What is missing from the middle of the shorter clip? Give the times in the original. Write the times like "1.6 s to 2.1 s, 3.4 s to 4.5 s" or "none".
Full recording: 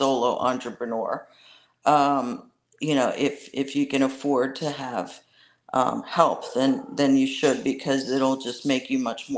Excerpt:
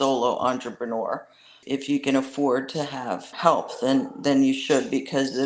1.6 s to 3.4 s, 5.2 s to 6.0 s